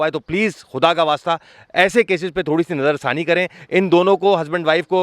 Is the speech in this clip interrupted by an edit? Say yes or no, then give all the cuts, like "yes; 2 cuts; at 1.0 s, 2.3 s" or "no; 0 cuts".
no; 0 cuts